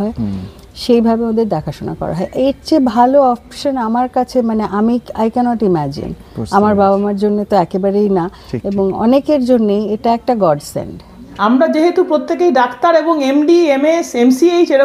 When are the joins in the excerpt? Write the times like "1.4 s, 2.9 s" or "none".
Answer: 11.2 s